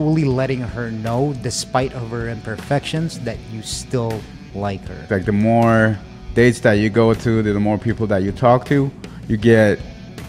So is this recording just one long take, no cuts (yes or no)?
no